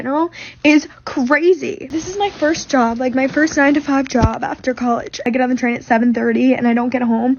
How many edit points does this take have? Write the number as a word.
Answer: two